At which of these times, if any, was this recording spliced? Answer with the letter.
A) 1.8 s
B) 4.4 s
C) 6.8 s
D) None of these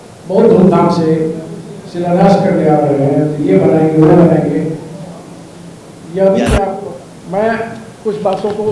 C